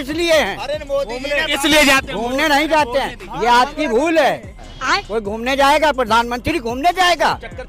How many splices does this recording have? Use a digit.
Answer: 1